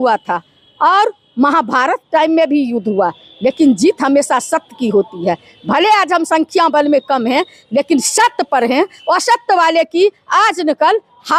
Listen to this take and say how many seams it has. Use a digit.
0